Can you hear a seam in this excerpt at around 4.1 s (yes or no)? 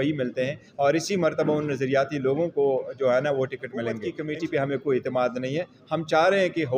yes